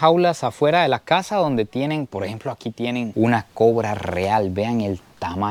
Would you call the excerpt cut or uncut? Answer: uncut